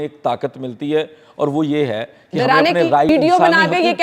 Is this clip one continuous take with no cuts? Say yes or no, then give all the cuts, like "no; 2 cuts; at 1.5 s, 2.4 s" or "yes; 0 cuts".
no; 1 cut; at 3.1 s